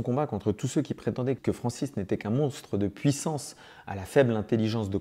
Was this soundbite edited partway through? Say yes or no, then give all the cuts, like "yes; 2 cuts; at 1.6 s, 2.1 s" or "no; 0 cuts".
yes; 1 cut; at 1.4 s